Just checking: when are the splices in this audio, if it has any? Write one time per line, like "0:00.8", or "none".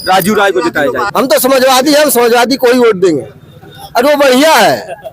0:01.0